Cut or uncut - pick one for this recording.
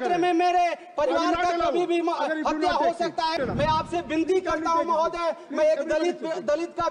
cut